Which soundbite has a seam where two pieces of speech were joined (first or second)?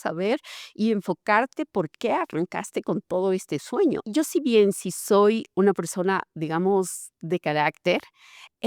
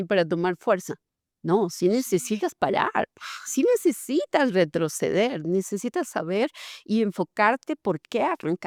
first